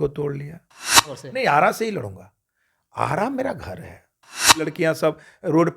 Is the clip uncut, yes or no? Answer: no